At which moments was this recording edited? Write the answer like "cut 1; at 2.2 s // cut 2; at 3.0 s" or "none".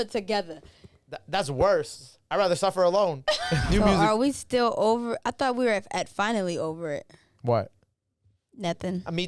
cut 1; at 3.6 s